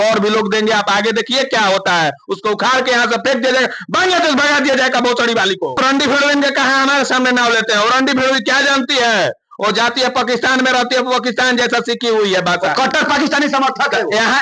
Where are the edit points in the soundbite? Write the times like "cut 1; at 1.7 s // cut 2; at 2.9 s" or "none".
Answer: cut 1; at 5.7 s

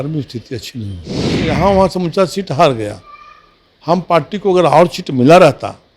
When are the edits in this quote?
cut 1; at 1.5 s

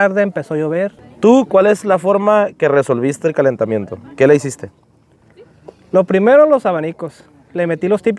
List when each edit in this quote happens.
cut 1; at 1.0 s

